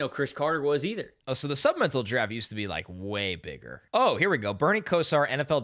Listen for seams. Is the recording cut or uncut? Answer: cut